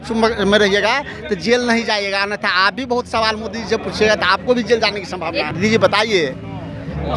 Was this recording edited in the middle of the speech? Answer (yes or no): yes